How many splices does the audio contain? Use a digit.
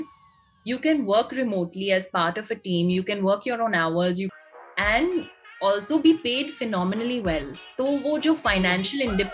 1